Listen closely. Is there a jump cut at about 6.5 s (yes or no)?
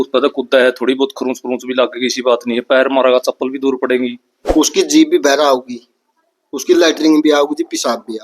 no